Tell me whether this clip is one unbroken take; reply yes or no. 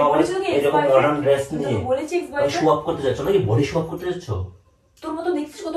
yes